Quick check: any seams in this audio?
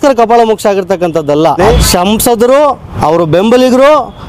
yes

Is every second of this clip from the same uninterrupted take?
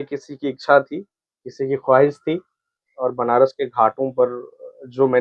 no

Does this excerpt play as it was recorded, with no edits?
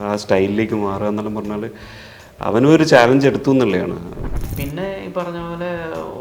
no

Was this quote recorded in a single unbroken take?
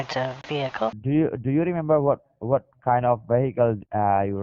no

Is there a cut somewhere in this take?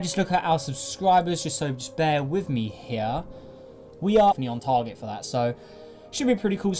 no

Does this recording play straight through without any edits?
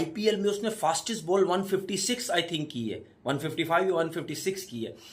yes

